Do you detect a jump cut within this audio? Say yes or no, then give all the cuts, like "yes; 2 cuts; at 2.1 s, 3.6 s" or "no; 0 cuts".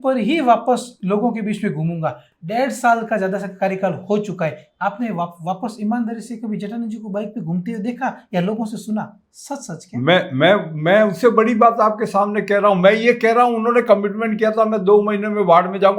no; 0 cuts